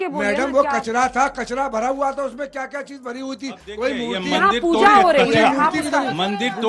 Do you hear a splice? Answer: no; 0 cuts

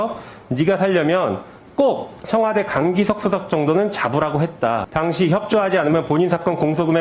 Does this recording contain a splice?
yes; 1 cut; at 4.9 s

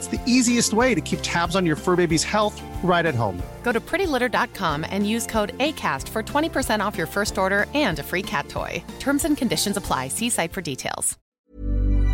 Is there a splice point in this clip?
yes; 1 cut; at 11.2 s

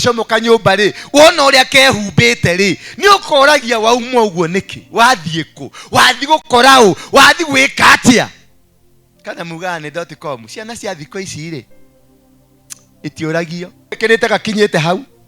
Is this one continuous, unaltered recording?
no; 1 cut; at 14.0 s

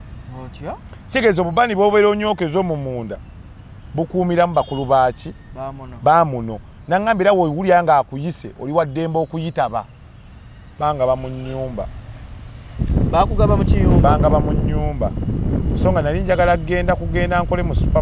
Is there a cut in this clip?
yes; 1 cut; at 10.6 s

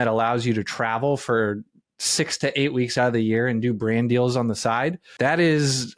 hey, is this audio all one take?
no; 1 cut; at 5.0 s

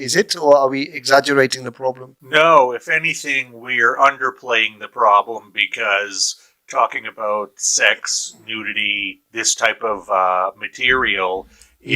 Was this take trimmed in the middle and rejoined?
yes; 1 cut; at 2.1 s

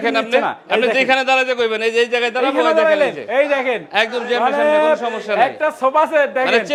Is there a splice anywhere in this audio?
no; 0 cuts

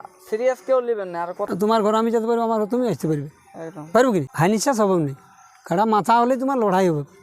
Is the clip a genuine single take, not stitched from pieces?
no; 2 cuts; at 1.4 s, 4.3 s

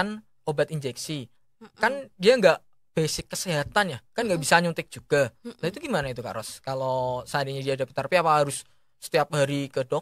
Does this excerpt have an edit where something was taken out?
no; 0 cuts

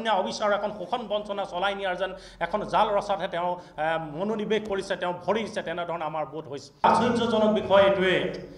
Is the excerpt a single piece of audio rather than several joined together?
no; 1 cut; at 6.8 s

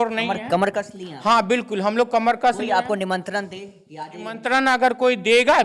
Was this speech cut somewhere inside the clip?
yes; 1 cut; at 4.4 s

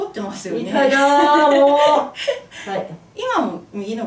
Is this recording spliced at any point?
no; 0 cuts

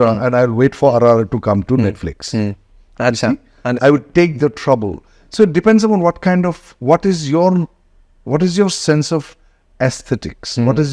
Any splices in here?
no; 0 cuts

